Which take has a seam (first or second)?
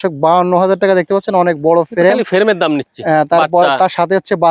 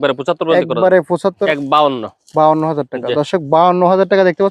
second